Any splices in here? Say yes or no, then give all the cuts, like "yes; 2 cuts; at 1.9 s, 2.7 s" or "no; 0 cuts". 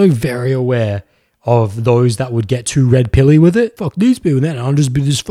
yes; 1 cut; at 3.8 s